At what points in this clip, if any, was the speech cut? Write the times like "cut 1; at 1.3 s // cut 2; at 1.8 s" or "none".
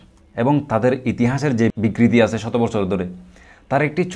cut 1; at 1.7 s